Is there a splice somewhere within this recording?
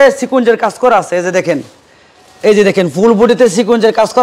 no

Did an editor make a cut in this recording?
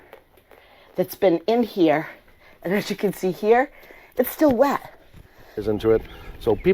yes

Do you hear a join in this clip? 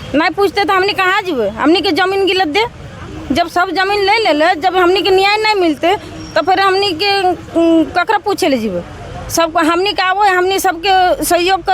no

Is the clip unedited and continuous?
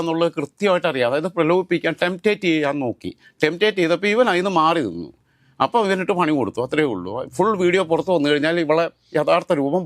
yes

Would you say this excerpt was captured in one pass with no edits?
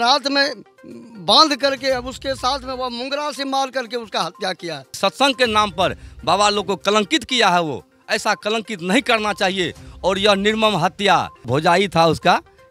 no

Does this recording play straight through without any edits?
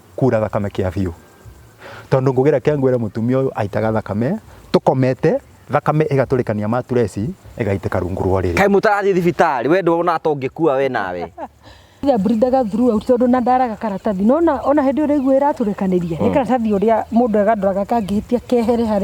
no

